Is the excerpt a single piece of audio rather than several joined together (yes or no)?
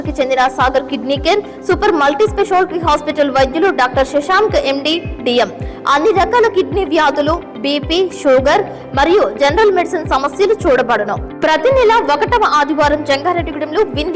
yes